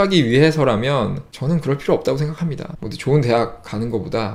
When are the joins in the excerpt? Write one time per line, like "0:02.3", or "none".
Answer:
none